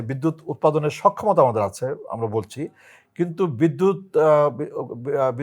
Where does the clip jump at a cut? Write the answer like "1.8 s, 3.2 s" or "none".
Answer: none